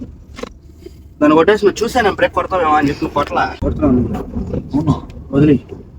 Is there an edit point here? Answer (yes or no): yes